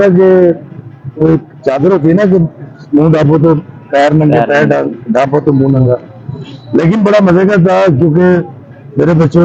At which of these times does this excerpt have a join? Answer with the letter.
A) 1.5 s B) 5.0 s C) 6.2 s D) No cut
D